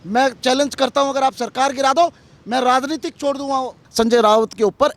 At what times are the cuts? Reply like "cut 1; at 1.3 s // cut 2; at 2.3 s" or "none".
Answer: cut 1; at 3.8 s

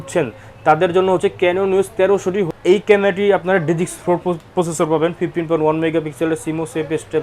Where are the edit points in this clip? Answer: cut 1; at 2.5 s

